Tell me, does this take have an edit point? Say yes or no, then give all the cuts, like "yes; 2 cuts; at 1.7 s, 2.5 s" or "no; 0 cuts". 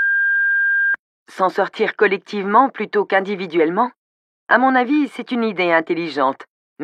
yes; 1 cut; at 1.1 s